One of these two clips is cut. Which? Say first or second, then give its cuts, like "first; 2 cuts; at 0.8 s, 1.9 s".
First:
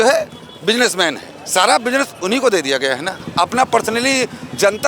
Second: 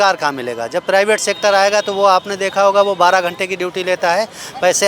first; 1 cut; at 3.2 s